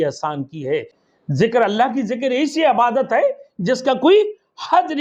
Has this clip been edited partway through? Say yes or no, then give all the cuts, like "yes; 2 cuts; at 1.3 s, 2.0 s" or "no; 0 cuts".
yes; 1 cut; at 1.0 s